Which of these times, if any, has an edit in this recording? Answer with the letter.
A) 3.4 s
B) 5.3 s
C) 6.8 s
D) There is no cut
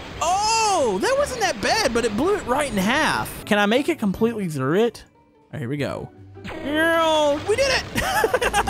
A